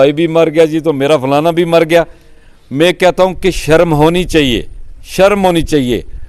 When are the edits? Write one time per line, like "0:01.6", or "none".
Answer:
none